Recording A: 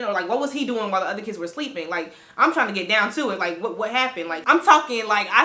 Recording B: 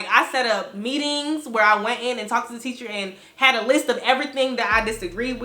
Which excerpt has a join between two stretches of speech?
A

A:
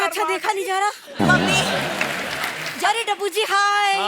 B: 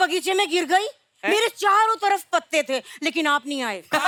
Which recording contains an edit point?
A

